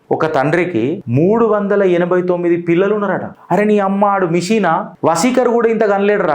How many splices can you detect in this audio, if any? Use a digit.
3